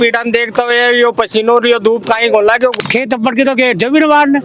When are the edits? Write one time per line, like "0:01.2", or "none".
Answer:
0:02.7